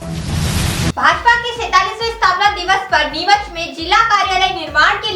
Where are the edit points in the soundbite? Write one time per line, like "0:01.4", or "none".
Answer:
0:00.9